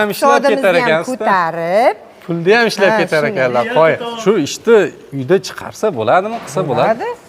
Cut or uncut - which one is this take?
cut